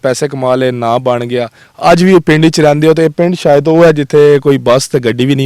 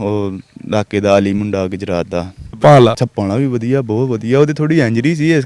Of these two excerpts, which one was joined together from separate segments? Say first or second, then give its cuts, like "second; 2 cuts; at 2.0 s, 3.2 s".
second; 2 cuts; at 2.5 s, 3.0 s